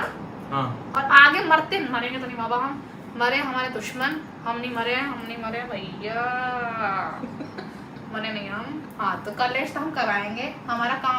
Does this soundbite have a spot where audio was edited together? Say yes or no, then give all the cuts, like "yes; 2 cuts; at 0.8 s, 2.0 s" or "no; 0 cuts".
no; 0 cuts